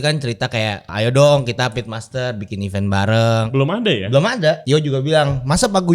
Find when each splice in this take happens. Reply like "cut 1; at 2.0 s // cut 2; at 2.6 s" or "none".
cut 1; at 0.9 s // cut 2; at 3.5 s // cut 3; at 4.6 s

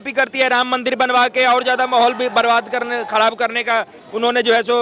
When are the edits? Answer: none

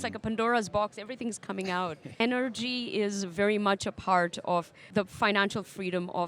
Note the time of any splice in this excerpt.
cut 1; at 2.2 s // cut 2; at 4.8 s

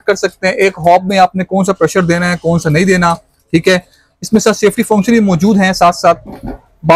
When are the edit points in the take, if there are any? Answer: none

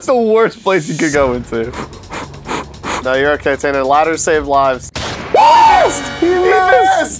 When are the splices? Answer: none

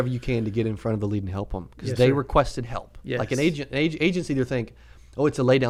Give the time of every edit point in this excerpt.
none

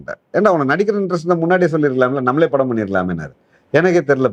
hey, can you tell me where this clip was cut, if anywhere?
none

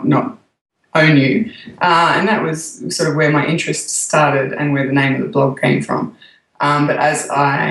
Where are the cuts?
cut 1; at 4.3 s

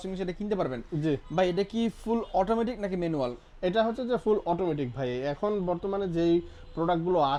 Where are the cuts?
none

